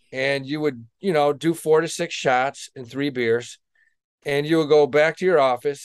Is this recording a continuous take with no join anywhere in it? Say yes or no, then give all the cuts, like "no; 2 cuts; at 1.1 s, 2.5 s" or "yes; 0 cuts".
yes; 0 cuts